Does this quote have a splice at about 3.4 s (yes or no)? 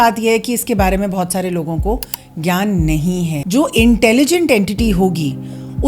yes